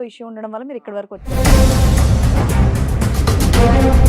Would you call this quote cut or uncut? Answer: cut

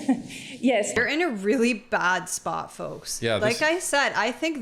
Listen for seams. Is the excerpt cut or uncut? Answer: cut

